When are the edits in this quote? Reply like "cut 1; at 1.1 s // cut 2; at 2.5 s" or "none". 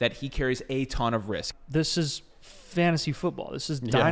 cut 1; at 1.5 s